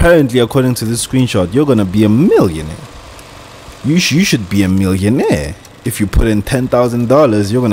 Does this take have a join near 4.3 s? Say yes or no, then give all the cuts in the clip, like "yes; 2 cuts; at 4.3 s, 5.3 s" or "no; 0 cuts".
no; 0 cuts